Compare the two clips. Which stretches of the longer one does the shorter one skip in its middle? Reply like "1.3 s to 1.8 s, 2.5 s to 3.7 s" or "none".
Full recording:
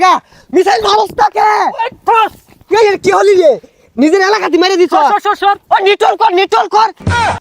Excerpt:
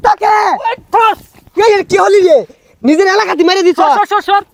none